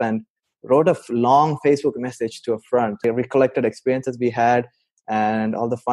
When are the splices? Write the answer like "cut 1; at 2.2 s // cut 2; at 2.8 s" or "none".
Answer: cut 1; at 3.0 s